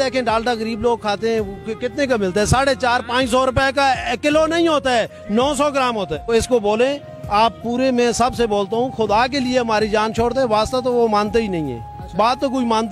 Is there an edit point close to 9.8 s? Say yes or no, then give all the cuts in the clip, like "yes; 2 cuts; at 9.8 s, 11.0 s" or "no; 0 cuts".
no; 1 cut; at 6.3 s